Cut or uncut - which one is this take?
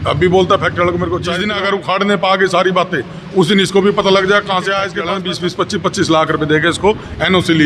cut